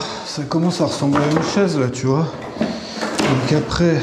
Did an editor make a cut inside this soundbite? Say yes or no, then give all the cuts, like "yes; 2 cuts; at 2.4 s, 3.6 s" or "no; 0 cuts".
no; 0 cuts